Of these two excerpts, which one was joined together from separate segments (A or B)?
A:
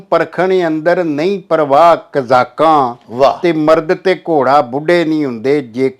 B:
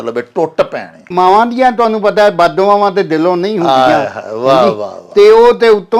B